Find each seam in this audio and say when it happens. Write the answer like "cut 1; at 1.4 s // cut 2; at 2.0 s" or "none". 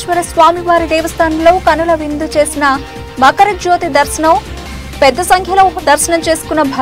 none